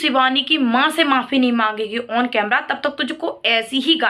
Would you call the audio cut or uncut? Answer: uncut